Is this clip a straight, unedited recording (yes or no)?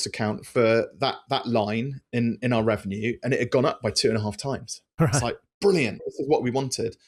yes